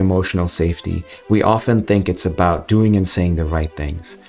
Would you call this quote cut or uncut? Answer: uncut